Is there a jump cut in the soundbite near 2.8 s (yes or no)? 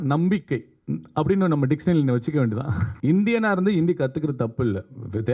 yes